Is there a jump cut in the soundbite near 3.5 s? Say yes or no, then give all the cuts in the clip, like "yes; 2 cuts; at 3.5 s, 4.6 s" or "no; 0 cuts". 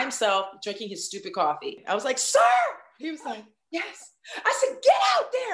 no; 1 cut; at 1.8 s